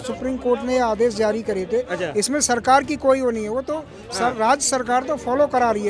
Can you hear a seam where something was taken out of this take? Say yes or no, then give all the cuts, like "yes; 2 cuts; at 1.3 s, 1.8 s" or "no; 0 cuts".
no; 0 cuts